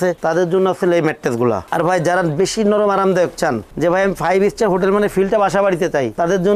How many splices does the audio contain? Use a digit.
1